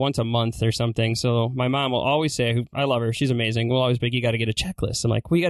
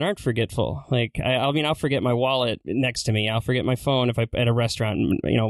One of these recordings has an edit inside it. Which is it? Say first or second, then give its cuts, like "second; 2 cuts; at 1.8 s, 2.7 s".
second; 1 cut; at 2.6 s